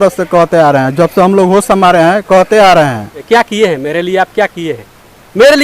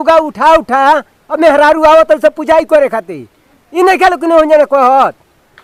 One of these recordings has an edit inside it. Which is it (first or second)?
first